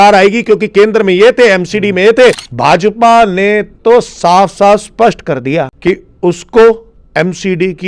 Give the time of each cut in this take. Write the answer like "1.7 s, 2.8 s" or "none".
2.5 s, 5.7 s

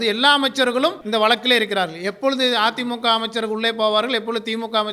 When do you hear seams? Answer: 1.0 s

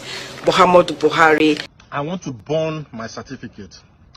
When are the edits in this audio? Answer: 1.7 s

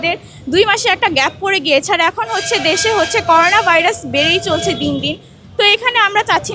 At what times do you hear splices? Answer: none

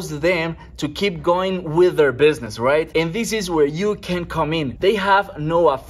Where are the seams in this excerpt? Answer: 2.5 s, 4.7 s

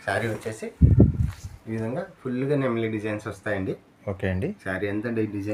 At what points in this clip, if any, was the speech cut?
none

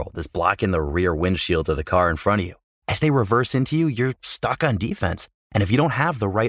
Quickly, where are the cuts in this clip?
none

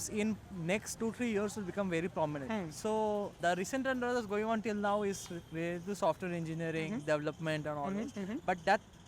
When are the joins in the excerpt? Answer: 1.0 s, 2.4 s, 3.4 s

